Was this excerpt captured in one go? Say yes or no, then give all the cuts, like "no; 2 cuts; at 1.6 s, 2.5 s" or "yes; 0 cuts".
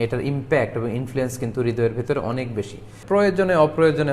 no; 1 cut; at 2.9 s